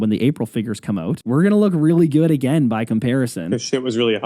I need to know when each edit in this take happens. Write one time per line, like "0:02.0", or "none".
0:01.2